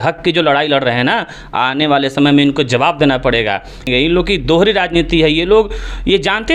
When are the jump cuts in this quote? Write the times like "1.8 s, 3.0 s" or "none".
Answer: 3.9 s